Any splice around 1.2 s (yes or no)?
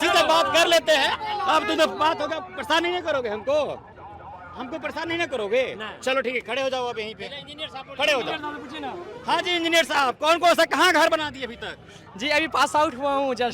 no